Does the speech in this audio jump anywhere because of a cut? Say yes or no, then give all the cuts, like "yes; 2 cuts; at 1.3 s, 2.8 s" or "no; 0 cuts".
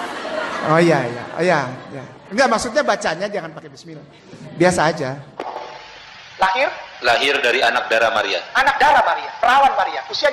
yes; 1 cut; at 5.4 s